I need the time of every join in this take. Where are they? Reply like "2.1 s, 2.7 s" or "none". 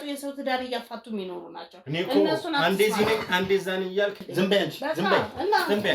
4.2 s